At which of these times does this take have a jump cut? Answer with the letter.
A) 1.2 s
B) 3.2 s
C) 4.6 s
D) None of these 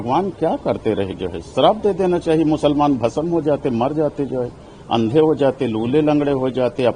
D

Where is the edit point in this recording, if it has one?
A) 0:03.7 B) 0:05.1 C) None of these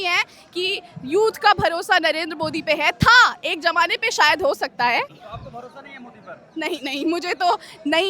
B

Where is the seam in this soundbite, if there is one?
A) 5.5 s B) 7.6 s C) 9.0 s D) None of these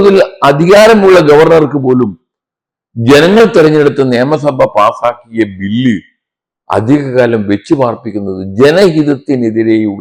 D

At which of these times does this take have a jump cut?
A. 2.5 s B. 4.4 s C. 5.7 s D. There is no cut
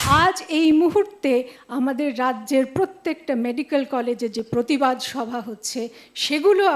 D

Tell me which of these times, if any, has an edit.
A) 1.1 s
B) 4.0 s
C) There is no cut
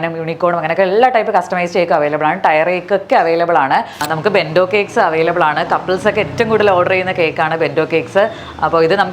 B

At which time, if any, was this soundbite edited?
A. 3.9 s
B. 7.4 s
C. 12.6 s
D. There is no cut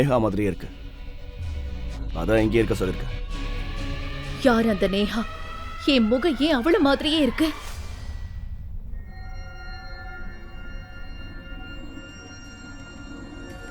D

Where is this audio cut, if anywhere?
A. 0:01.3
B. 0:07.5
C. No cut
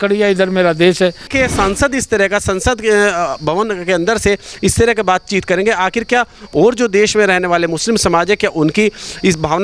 A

